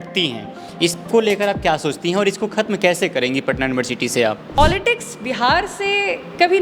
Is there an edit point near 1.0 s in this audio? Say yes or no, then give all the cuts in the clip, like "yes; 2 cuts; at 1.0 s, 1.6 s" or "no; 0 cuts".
no; 1 cut; at 4.5 s